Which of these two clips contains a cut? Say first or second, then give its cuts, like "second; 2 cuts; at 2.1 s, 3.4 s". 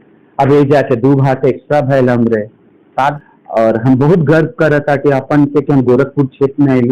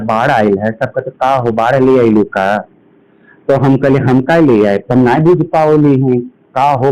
first; 1 cut; at 3.2 s